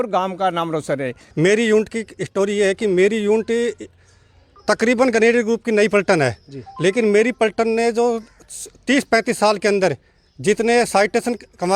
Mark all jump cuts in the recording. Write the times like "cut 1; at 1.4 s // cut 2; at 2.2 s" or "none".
cut 1; at 1.2 s

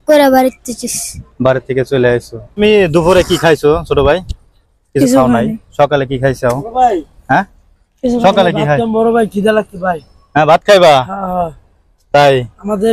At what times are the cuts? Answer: cut 1; at 2.5 s

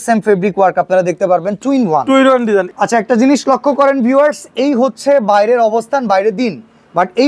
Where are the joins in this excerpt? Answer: cut 1; at 2.7 s

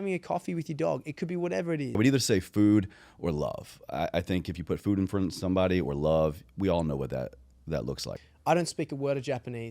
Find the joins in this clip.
cut 1; at 2.0 s // cut 2; at 8.1 s

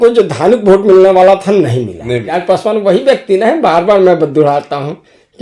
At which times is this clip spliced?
cut 1; at 2.3 s

